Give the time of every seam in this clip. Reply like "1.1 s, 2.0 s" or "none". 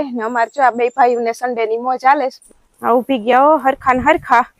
2.4 s